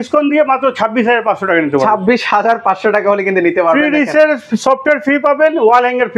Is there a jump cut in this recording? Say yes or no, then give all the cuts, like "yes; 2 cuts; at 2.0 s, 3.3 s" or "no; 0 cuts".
no; 0 cuts